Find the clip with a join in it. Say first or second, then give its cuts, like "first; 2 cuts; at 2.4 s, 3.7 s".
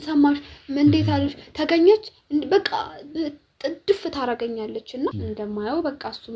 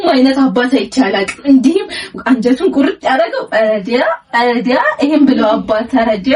first; 1 cut; at 5.2 s